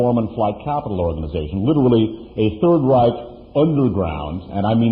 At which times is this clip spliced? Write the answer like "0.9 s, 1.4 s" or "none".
3.7 s